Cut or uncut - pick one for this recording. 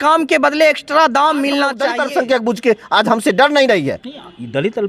cut